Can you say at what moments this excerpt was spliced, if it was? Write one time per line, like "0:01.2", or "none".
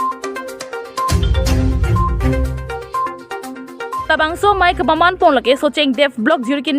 none